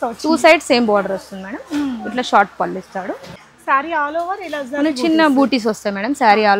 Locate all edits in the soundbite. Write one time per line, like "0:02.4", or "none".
0:03.3